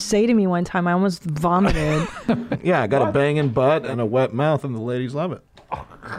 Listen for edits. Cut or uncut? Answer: cut